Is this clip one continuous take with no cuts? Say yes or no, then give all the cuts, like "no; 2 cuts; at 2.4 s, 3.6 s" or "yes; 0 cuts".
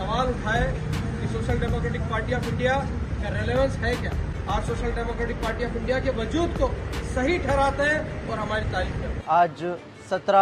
no; 2 cuts; at 4.3 s, 9.2 s